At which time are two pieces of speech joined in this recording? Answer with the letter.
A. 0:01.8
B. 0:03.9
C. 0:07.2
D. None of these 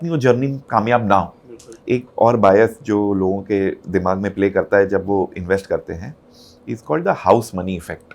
A